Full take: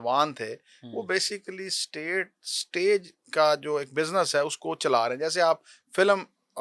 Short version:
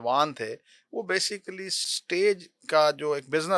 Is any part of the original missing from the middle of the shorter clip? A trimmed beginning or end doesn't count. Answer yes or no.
yes